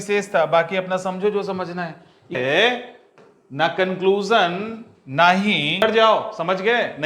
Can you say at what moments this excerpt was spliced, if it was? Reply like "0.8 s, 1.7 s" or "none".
2.4 s, 5.8 s